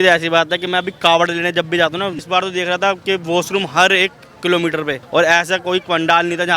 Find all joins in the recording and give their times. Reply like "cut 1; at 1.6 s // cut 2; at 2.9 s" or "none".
cut 1; at 2.2 s // cut 2; at 5.0 s